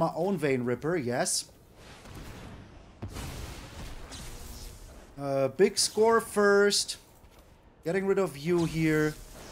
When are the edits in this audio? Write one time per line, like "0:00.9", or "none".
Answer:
0:05.1